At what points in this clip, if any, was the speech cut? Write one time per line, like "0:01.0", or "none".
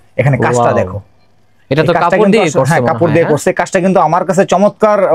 none